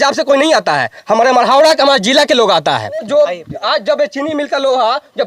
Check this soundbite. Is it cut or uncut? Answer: cut